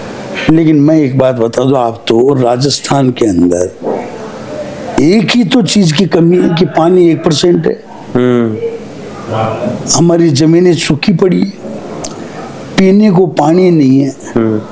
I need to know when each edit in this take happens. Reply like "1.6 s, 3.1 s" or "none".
none